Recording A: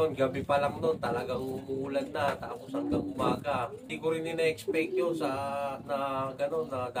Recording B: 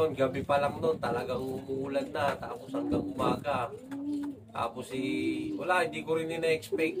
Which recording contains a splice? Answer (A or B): A